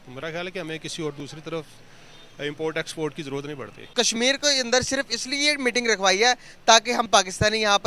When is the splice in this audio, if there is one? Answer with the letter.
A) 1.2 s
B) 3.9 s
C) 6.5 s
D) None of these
B